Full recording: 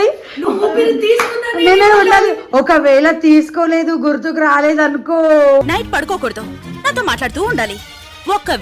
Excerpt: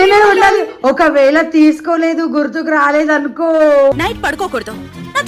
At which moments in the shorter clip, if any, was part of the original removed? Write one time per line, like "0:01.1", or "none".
none